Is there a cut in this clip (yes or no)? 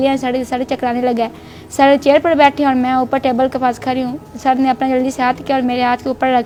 no